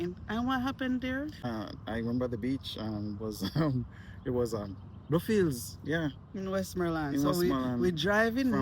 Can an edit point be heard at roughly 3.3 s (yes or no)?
no